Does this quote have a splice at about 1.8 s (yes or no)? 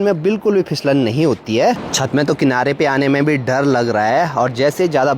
yes